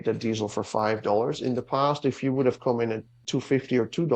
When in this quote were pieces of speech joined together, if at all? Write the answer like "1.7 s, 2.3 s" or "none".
none

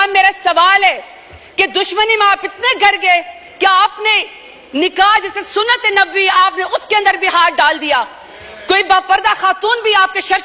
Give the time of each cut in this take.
none

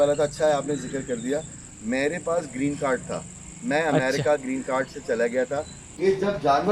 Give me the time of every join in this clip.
5.8 s

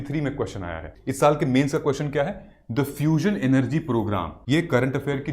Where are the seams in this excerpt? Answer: 0.9 s, 4.3 s

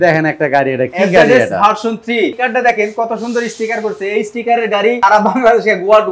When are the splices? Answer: 2.4 s, 5.0 s

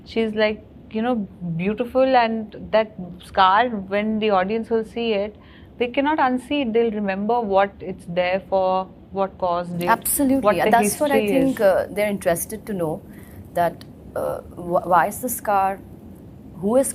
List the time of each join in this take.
none

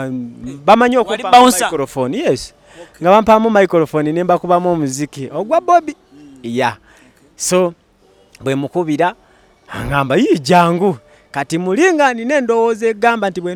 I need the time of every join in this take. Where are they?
none

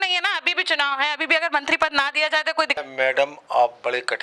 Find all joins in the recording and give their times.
2.8 s

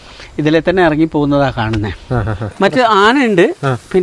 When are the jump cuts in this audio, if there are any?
2.5 s

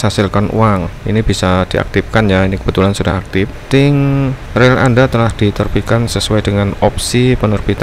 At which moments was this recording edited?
3.6 s, 4.4 s

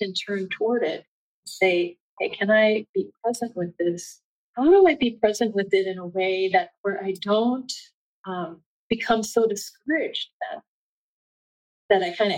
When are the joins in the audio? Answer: 2.0 s, 4.6 s

